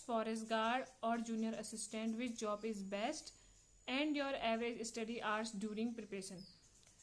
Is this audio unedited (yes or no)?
yes